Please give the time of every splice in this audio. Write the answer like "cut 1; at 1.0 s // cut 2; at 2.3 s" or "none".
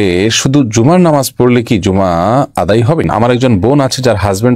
cut 1; at 3.0 s